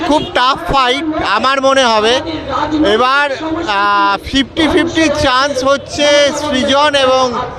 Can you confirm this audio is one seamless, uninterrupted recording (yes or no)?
yes